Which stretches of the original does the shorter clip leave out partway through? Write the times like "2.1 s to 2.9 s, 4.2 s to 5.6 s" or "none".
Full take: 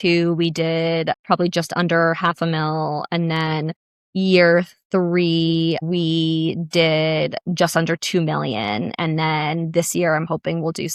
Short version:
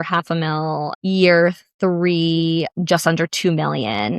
3.0 s to 4.0 s, 5.8 s to 7.4 s

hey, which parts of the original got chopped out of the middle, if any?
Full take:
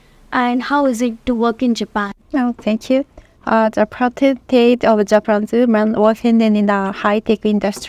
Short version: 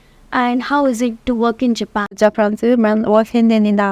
2.2 s to 5.1 s

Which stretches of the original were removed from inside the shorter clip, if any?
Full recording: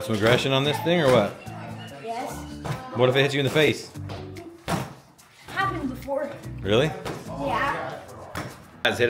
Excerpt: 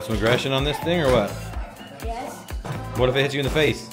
none

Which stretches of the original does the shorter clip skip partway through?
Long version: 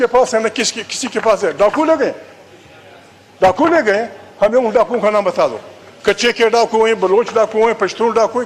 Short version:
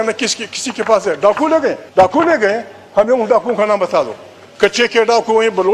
2.2 s to 3.3 s

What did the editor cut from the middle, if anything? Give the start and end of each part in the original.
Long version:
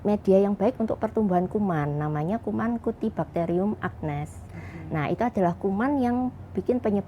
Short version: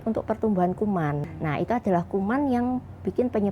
2.0 s to 4.7 s

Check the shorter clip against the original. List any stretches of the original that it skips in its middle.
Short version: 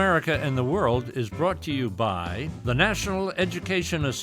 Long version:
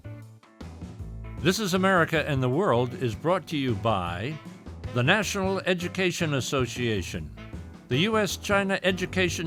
4.3 s to 4.7 s

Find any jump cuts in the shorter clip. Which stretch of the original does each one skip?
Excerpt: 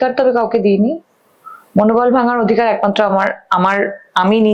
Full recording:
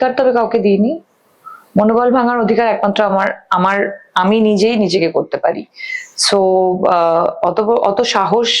none

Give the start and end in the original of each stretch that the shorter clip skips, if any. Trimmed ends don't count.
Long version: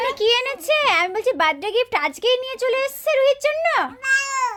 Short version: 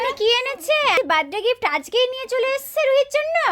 0.9 s to 1.2 s

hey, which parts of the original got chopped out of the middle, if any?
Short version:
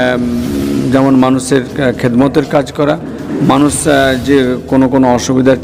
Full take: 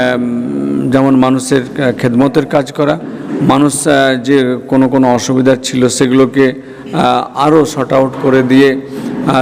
none

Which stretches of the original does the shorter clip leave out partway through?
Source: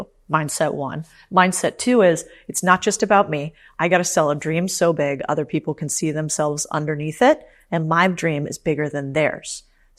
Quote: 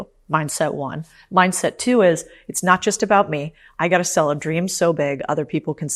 none

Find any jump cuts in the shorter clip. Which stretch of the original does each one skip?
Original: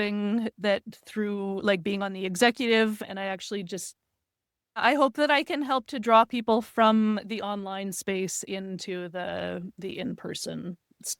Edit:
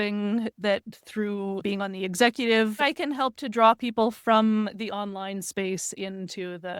1.6 s to 1.8 s, 3.0 s to 5.3 s

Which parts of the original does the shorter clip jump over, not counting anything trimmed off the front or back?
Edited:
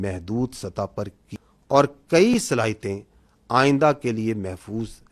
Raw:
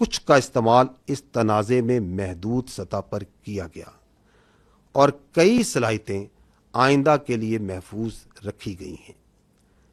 3.4 s to 4.5 s

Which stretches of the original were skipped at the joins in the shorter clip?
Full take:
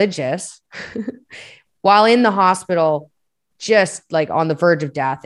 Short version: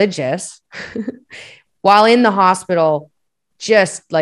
none

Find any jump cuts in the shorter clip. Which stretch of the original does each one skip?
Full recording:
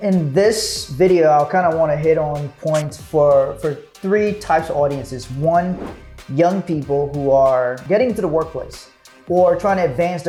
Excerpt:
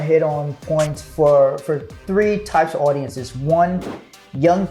none

